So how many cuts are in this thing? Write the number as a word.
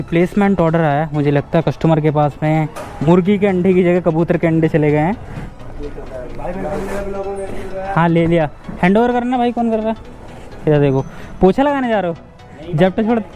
two